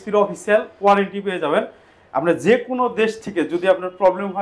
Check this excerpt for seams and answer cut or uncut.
uncut